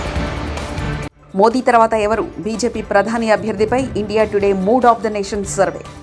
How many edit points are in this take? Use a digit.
1